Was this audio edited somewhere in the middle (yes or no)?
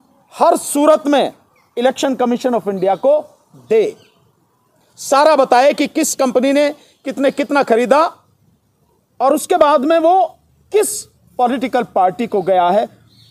no